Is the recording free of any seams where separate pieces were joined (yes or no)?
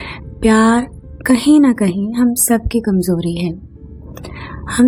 yes